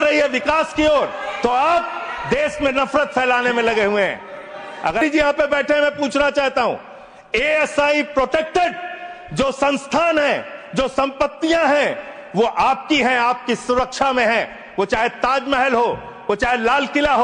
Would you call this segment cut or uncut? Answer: cut